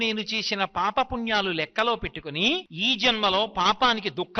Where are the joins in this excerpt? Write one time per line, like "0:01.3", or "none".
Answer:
0:02.7